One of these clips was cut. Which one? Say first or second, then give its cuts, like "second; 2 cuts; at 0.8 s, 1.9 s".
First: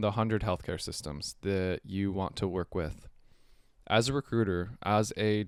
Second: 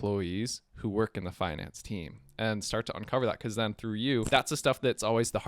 second; 1 cut; at 4.3 s